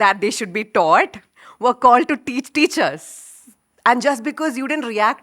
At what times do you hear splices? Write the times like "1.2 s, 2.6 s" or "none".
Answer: none